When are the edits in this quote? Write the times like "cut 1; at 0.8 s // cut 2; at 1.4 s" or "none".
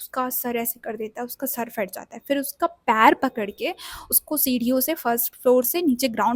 none